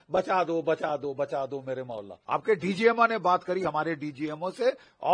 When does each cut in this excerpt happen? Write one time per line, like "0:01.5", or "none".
0:02.1